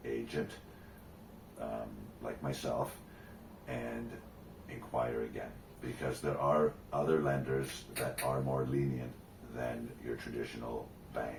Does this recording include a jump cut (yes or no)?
no